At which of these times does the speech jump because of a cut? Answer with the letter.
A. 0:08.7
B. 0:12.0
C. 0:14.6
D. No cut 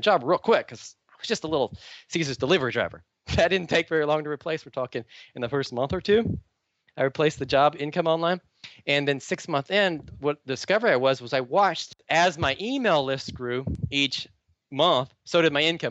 B